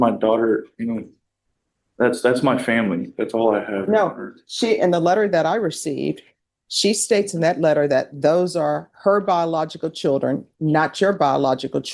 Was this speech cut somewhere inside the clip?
no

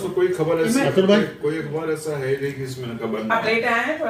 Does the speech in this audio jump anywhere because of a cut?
no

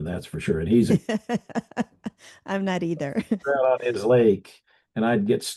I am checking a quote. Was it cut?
no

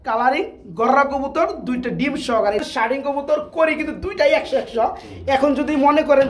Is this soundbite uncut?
no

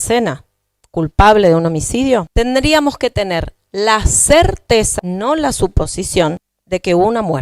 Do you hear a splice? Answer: yes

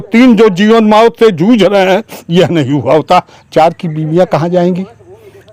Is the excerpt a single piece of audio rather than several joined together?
yes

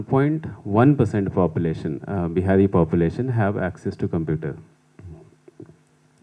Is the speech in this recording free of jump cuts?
yes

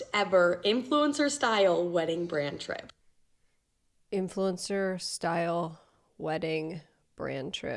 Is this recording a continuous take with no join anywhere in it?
yes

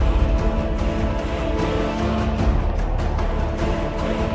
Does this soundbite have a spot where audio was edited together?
no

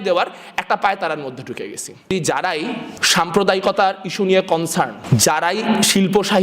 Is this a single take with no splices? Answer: no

